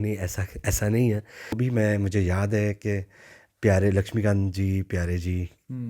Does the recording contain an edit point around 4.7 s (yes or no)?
no